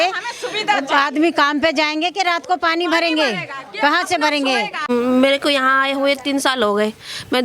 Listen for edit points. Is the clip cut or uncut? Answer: cut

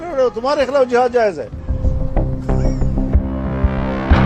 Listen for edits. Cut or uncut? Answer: uncut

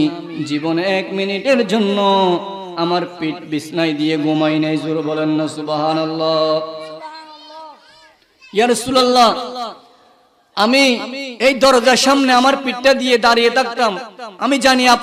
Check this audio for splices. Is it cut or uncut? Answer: uncut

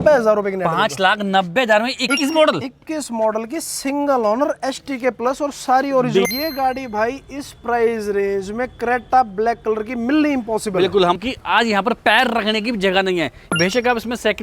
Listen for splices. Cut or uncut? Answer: cut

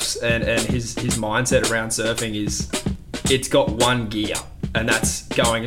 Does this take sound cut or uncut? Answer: uncut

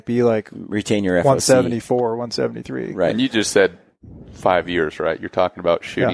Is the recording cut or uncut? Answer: uncut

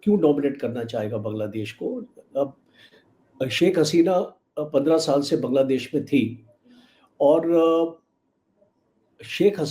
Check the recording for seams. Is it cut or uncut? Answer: uncut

